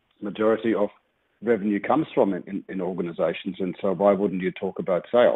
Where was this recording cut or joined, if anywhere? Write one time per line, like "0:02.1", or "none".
none